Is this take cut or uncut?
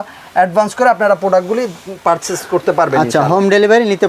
uncut